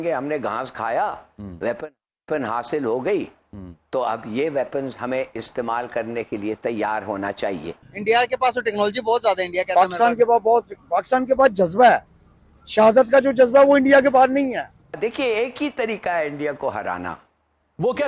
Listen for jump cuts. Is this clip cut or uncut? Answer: cut